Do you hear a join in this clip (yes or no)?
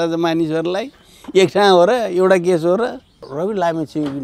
yes